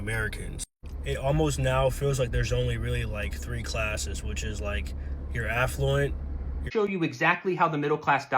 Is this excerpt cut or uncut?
cut